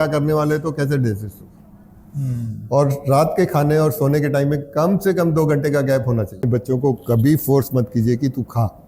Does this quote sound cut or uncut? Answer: cut